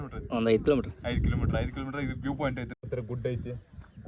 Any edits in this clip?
yes; 1 cut; at 2.8 s

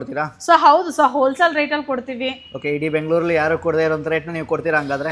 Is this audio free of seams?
yes; 0 cuts

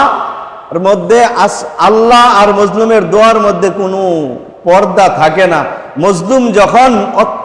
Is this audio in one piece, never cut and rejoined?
yes; 0 cuts

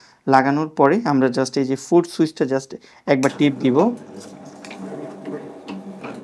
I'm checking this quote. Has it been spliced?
no; 0 cuts

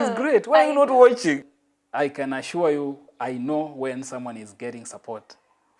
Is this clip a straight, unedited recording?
no; 1 cut; at 1.4 s

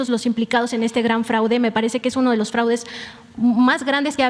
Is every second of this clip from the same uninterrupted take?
yes; 0 cuts

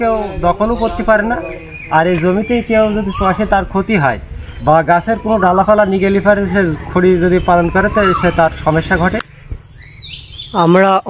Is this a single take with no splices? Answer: no; 1 cut; at 9.3 s

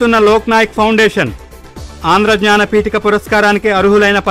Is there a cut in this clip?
no; 0 cuts

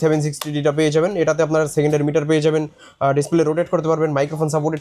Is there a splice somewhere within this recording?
no; 0 cuts

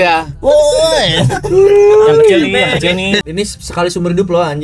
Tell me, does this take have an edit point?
yes; 1 cut; at 3.2 s

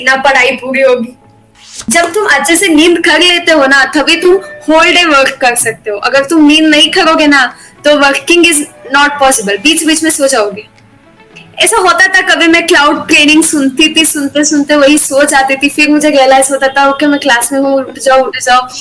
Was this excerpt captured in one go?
no; 1 cut; at 1.5 s

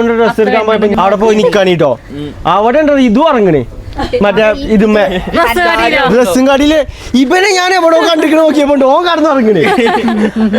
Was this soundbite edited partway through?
yes; 1 cut; at 0.9 s

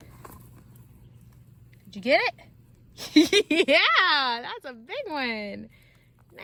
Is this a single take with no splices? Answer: yes; 0 cuts

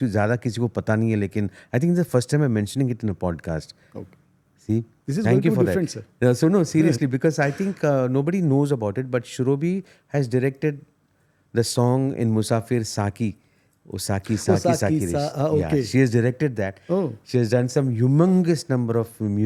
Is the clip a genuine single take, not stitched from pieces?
yes; 0 cuts

